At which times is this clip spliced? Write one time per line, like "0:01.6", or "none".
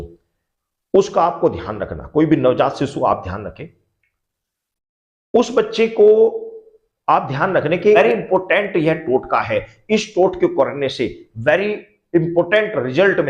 0:08.0